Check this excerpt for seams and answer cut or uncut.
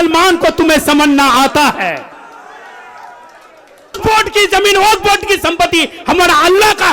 cut